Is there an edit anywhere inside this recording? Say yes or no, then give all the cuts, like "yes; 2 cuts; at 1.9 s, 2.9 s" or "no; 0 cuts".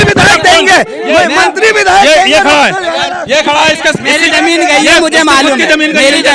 no; 0 cuts